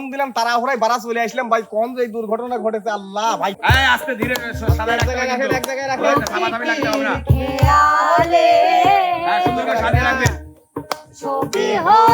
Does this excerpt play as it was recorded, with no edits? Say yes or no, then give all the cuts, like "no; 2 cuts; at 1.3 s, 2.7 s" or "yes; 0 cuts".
no; 1 cut; at 3.6 s